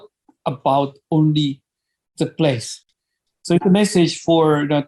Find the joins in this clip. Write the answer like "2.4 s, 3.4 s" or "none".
2.8 s